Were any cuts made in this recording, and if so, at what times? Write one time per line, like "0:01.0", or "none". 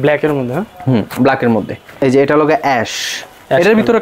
0:02.0